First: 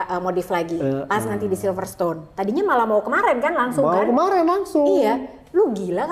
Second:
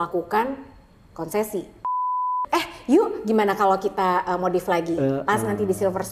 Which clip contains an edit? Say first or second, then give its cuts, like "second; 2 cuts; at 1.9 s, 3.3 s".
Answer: second; 1 cut; at 2.2 s